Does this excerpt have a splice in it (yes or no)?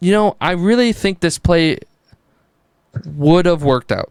no